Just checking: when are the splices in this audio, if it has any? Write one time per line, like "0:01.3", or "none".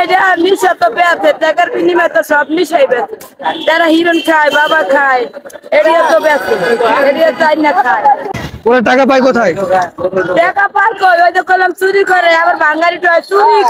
none